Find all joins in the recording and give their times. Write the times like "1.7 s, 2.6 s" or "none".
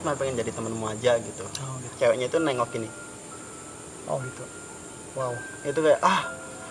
1.8 s